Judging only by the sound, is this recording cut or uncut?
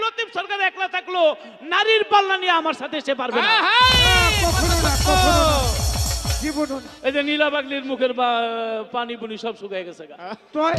uncut